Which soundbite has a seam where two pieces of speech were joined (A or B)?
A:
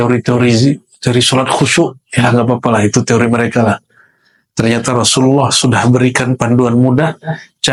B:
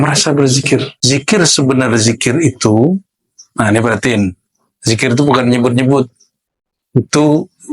B